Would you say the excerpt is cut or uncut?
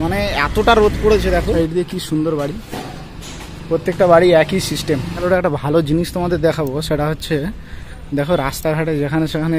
cut